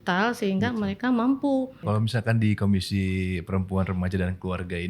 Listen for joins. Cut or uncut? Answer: cut